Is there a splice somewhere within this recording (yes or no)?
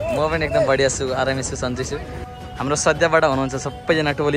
yes